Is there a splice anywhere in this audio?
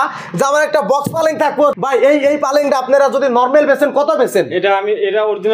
yes; 1 cut; at 1.7 s

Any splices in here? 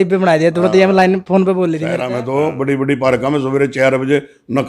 yes; 1 cut; at 2.0 s

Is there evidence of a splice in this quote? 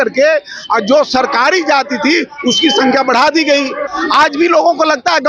yes; 1 cut; at 3.8 s

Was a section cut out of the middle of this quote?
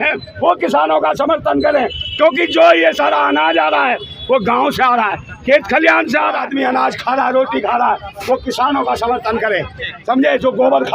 yes; 1 cut; at 6.4 s

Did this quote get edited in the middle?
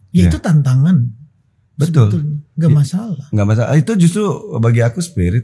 no; 0 cuts

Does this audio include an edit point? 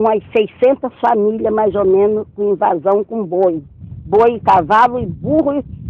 no; 0 cuts

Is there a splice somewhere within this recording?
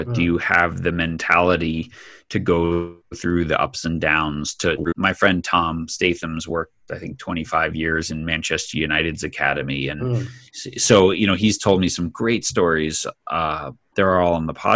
no; 0 cuts

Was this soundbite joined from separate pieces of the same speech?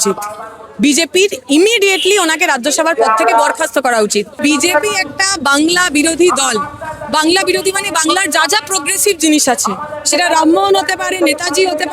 yes; 1 cut; at 4.3 s

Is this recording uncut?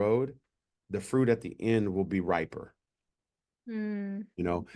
yes; 0 cuts

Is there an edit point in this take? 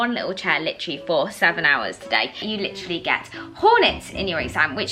yes; 1 cut; at 2.4 s

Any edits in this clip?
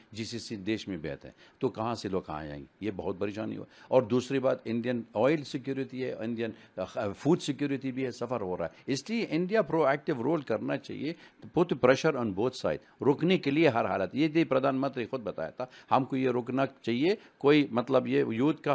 no; 0 cuts

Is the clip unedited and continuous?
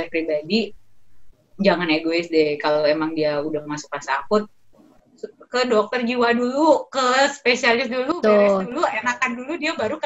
yes; 0 cuts

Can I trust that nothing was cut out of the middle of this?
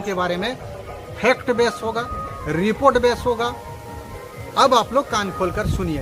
yes; 0 cuts

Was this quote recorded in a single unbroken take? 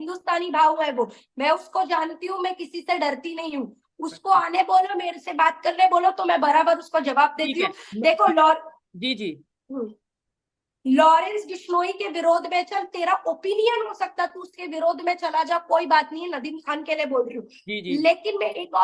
yes; 0 cuts

